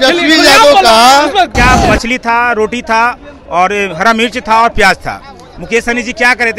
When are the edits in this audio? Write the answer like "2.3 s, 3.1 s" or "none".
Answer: 1.6 s